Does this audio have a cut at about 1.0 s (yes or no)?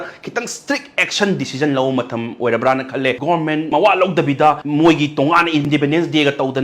no